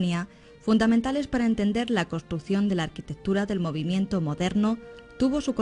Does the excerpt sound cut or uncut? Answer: cut